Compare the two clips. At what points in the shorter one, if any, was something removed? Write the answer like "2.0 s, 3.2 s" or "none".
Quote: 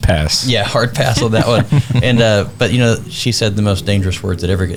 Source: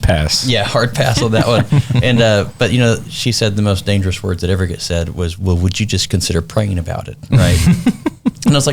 none